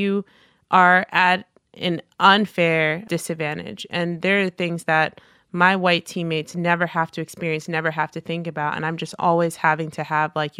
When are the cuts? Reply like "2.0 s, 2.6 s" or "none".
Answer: 3.0 s, 9.2 s